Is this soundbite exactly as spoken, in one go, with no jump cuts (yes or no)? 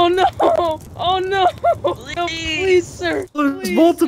no